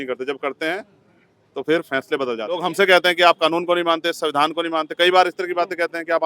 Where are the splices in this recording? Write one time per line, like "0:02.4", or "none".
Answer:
0:02.6

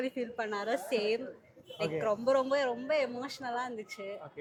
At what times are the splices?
none

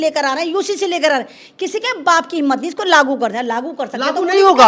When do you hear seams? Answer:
none

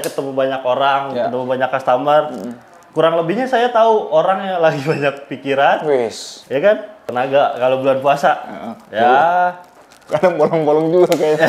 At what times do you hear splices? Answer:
0:07.0

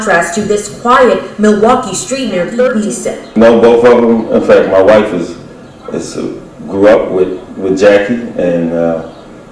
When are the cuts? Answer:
0:02.7

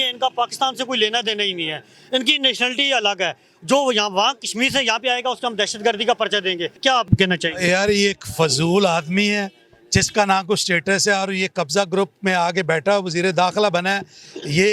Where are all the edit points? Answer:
0:06.9

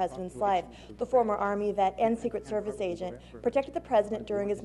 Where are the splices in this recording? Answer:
none

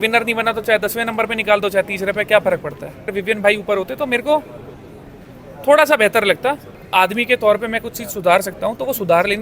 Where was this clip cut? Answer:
0:03.2
0:06.8

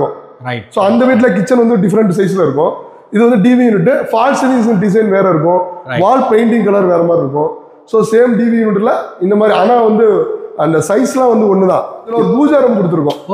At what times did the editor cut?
0:12.0

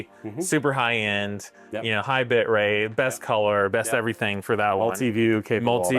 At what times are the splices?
none

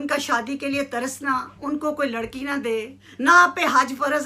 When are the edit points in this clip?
0:03.0

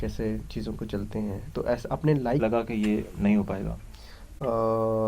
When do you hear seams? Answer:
0:02.4

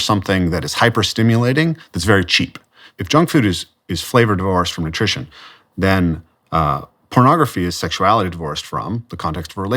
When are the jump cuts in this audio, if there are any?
0:02.9

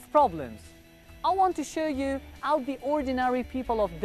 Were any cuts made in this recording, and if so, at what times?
0:02.8

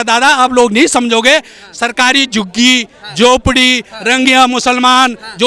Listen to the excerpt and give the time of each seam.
none

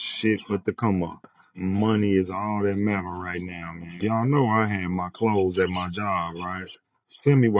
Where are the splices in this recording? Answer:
none

